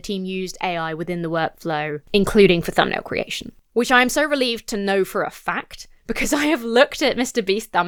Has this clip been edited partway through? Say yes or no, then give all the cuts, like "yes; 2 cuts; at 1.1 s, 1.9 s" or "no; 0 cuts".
no; 0 cuts